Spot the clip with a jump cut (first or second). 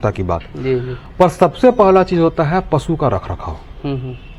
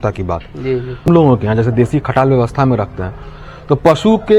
second